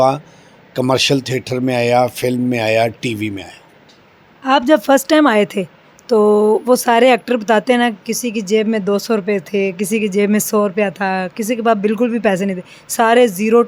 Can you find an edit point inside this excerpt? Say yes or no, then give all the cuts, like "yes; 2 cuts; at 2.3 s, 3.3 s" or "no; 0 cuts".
no; 0 cuts